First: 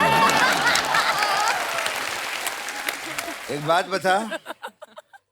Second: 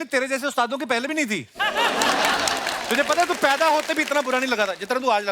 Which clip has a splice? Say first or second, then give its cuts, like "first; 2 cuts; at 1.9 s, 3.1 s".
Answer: first; 1 cut; at 3.3 s